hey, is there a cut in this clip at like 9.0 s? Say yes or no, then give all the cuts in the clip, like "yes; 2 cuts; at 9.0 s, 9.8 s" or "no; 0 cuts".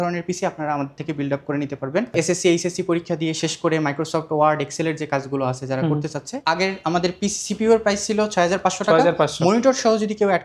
no; 2 cuts; at 2.1 s, 6.4 s